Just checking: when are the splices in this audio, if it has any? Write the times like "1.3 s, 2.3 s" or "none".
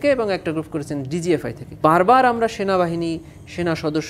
1.8 s